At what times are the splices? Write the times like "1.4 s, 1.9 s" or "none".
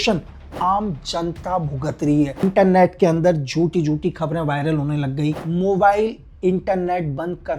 2.4 s, 5.4 s